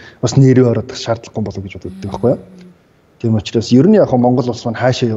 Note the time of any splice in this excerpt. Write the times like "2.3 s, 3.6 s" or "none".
none